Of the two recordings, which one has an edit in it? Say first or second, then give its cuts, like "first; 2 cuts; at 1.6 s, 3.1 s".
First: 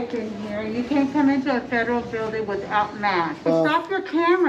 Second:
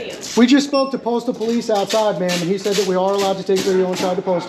first; 1 cut; at 3.5 s